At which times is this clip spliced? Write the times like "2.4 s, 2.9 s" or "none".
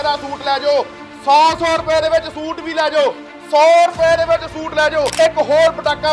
5.1 s